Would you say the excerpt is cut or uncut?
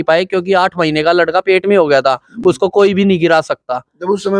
uncut